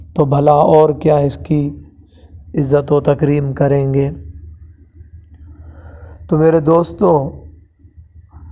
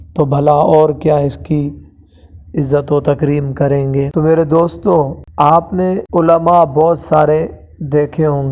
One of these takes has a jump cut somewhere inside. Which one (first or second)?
second